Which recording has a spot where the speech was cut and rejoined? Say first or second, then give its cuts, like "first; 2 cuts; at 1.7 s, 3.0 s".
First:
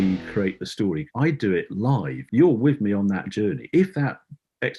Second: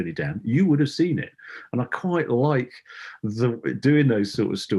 first; 2 cuts; at 1.0 s, 2.2 s